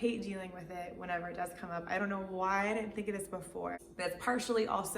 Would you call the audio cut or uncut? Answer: cut